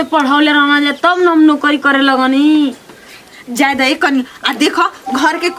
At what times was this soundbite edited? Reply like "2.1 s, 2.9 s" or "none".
none